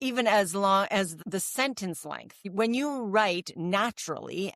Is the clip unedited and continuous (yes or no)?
no